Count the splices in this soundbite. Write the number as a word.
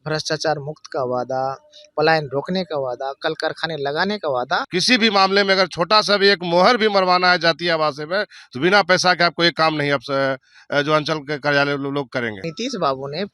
two